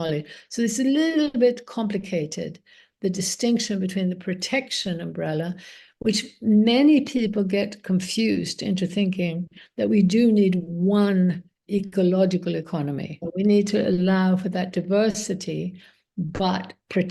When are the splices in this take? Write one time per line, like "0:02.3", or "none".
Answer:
0:13.2